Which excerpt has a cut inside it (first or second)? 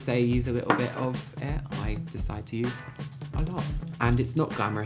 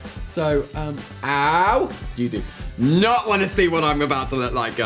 second